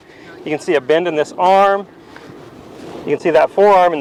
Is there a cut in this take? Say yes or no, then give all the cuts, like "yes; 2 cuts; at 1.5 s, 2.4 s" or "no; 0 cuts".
no; 0 cuts